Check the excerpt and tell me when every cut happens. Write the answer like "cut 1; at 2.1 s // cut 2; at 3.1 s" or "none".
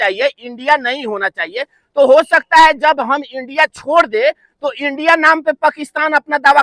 none